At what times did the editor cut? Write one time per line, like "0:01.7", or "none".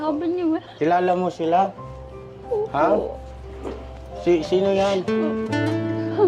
none